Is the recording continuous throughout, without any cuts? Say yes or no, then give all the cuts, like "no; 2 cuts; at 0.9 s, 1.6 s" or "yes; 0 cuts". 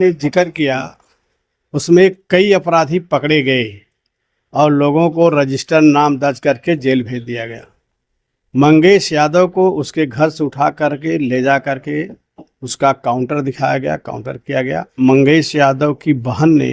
no; 1 cut; at 14.9 s